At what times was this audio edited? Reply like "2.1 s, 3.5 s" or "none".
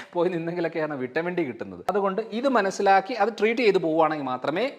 1.9 s